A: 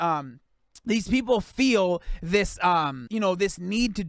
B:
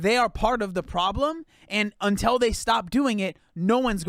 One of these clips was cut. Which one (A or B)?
A